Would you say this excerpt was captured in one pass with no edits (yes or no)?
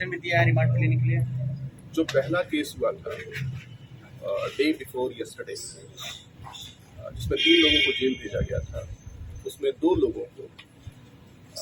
yes